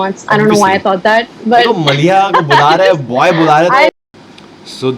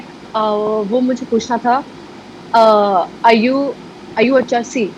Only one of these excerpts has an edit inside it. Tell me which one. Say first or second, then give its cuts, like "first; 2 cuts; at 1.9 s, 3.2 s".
first; 1 cut; at 3.9 s